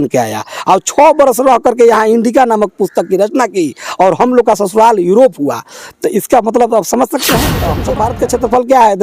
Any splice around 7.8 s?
yes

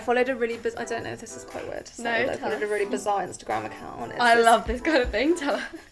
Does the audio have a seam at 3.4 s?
no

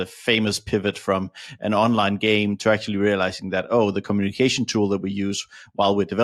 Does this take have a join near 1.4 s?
no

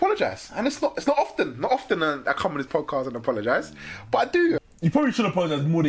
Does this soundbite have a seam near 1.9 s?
no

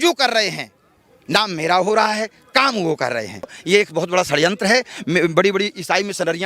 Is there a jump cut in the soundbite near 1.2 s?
no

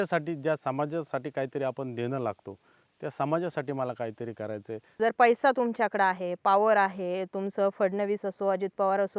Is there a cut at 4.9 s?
yes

